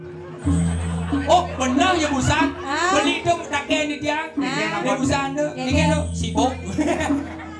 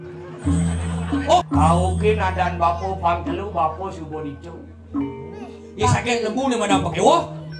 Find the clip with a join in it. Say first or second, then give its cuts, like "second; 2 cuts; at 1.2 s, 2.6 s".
second; 1 cut; at 1.5 s